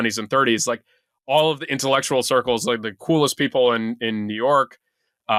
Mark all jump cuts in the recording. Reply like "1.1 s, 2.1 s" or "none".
none

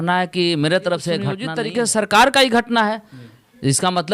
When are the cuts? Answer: 1.4 s

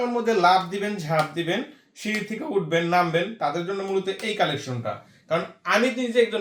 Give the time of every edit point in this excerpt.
none

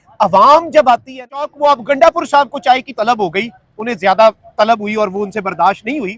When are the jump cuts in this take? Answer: 1.4 s

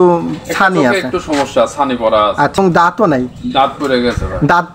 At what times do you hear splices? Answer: 2.6 s

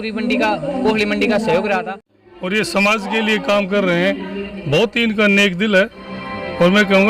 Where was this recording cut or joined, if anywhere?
2.1 s

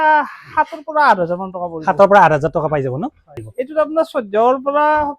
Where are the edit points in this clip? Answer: 3.3 s

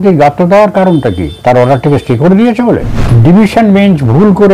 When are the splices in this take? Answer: 1.3 s, 3.0 s

